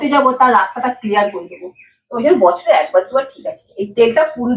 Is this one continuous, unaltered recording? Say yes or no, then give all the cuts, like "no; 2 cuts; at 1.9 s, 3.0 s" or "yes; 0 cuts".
yes; 0 cuts